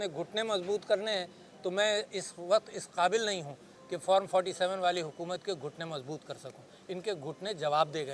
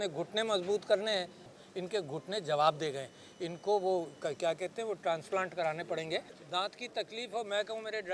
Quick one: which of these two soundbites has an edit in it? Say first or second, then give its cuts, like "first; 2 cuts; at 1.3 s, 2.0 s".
second; 2 cuts; at 1.4 s, 6.4 s